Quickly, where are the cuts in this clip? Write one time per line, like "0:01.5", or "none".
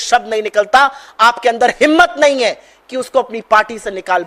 none